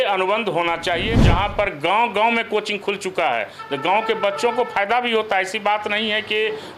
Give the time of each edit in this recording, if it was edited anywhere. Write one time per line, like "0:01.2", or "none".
0:01.2

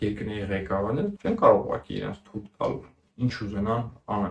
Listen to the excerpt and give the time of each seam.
0:01.2

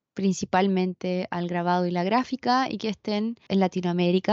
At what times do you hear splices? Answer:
0:03.4

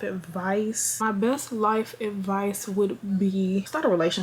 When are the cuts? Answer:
none

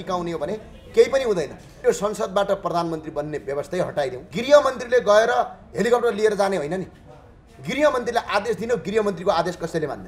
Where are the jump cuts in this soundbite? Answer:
0:01.6
0:04.2

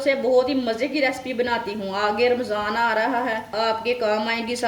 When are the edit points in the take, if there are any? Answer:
0:03.5

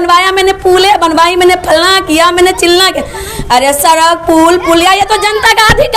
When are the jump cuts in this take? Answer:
none

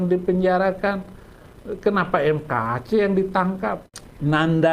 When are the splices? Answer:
0:03.8

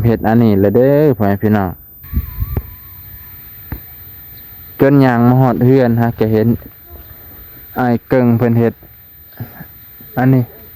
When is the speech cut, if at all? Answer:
0:01.9

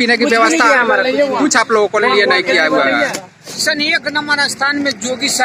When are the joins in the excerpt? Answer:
0:03.6

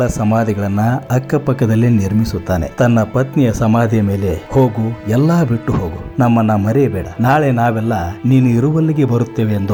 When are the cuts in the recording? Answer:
none

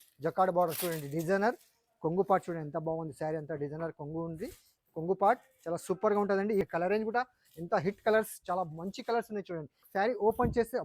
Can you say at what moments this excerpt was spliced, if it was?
0:06.6
0:09.8

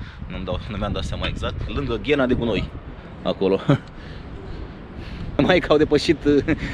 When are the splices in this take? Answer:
0:05.4

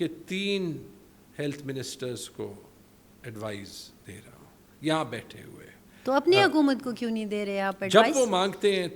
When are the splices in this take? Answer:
none

